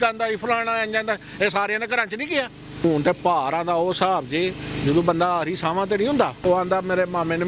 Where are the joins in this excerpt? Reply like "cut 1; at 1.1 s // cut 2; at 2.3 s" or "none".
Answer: cut 1; at 2.8 s // cut 2; at 6.4 s